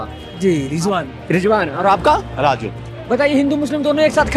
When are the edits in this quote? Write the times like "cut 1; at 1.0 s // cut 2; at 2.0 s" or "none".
none